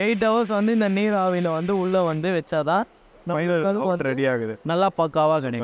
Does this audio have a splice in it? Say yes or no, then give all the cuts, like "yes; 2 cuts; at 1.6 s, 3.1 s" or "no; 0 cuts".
no; 0 cuts